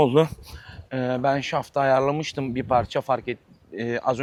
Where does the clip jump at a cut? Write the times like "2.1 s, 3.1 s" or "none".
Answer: none